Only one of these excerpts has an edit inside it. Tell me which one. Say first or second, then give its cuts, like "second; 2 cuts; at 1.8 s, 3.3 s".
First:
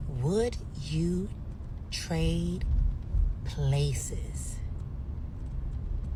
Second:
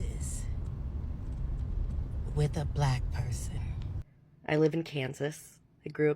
second; 1 cut; at 4.0 s